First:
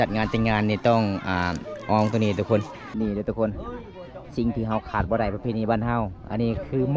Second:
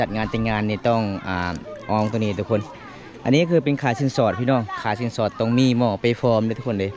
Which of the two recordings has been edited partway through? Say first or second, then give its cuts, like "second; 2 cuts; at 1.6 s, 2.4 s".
first; 1 cut; at 2.8 s